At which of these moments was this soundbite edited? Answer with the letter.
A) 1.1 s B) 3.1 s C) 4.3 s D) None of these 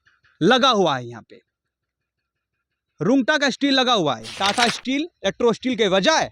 C